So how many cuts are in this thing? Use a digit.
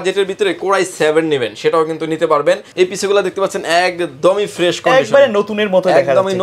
1